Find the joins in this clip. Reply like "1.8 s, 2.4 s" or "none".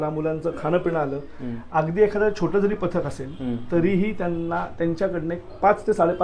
none